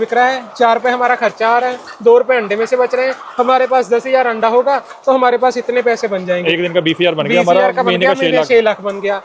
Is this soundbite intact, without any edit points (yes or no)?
yes